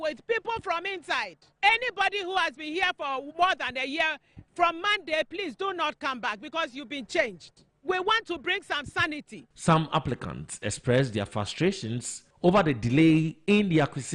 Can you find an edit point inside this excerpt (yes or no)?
no